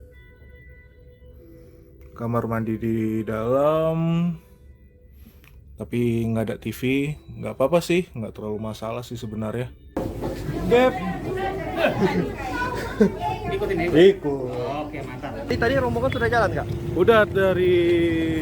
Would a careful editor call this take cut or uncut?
cut